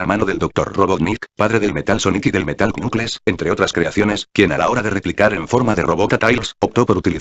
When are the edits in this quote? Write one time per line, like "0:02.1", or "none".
0:05.2